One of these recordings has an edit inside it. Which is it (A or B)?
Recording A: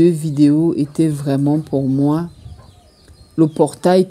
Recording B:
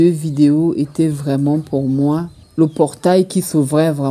B